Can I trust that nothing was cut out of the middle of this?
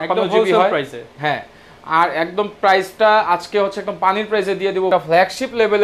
no; 1 cut; at 4.9 s

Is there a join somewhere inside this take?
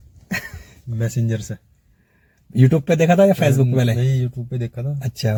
no; 0 cuts

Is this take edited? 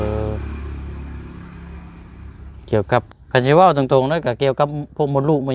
yes; 1 cut; at 3.1 s

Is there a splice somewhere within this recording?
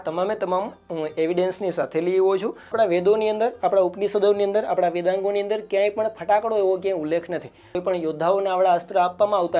yes; 2 cuts; at 2.7 s, 7.8 s

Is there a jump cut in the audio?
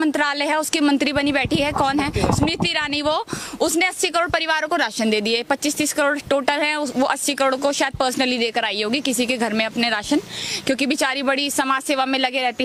no; 0 cuts

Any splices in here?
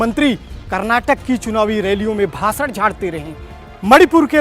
no; 0 cuts

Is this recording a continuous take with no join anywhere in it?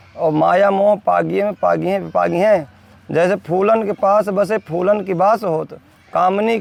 yes; 0 cuts

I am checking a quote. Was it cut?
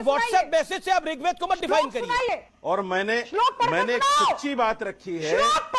yes; 1 cut; at 2.5 s

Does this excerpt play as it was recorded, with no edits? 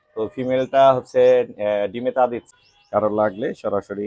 no; 1 cut; at 2.5 s

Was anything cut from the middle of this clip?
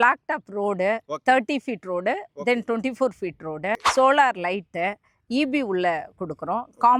yes; 1 cut; at 3.8 s

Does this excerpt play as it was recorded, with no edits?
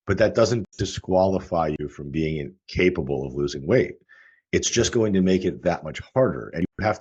yes; 0 cuts

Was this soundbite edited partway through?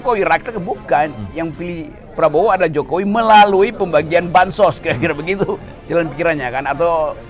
no; 0 cuts

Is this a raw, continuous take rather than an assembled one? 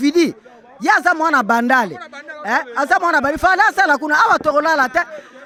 yes; 0 cuts

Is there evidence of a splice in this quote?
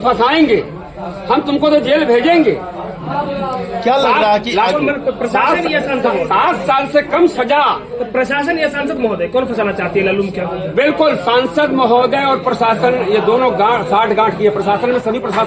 no; 0 cuts

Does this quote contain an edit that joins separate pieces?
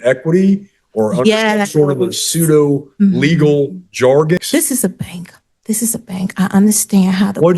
yes; 1 cut; at 4.4 s

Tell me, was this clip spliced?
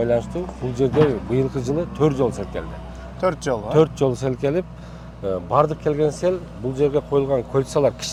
no; 0 cuts

